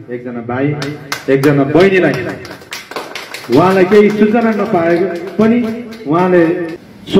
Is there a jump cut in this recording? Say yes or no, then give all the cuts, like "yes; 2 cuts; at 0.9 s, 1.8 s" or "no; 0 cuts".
no; 0 cuts